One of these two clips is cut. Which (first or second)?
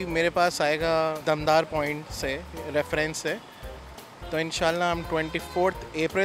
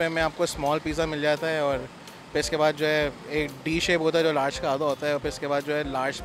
first